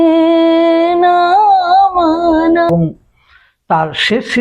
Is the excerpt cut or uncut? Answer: cut